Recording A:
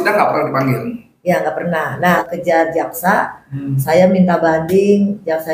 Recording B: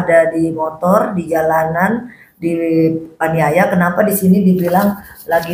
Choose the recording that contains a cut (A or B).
A